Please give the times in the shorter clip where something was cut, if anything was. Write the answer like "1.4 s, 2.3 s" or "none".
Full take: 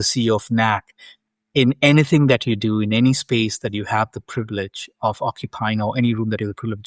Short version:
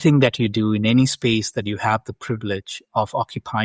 none